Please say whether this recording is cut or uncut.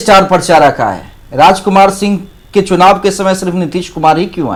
uncut